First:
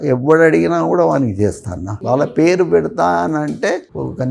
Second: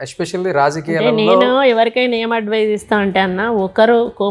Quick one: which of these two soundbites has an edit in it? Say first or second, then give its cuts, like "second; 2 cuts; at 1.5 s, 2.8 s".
first; 1 cut; at 2.3 s